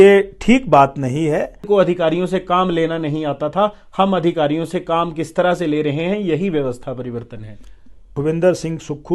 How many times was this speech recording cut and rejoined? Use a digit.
2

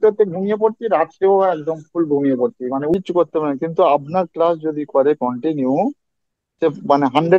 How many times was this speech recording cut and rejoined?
1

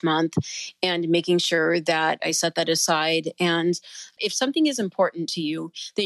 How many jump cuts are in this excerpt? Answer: 1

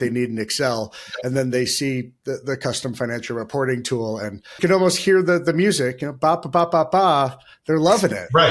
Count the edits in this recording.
1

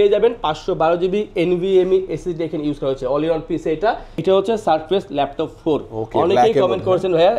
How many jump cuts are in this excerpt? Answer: 1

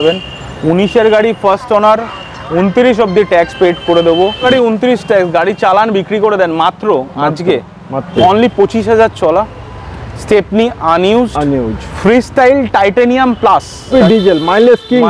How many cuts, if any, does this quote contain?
3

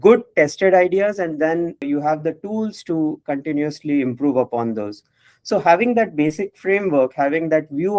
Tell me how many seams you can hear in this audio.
1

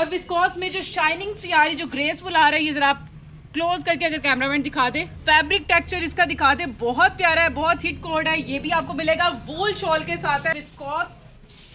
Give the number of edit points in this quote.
2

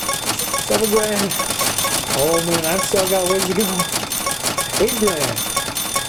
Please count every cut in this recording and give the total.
0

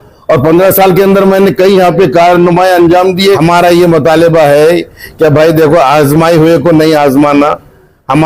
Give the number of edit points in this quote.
1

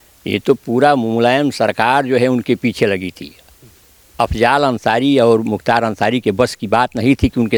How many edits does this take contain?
0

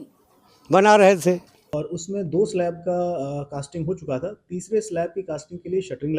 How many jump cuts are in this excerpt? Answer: 1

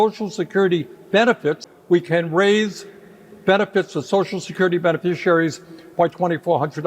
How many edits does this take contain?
1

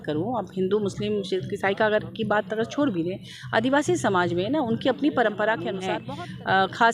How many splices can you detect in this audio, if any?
1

